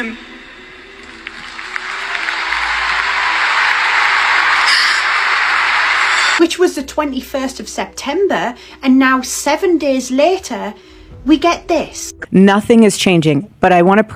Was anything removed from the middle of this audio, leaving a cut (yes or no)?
no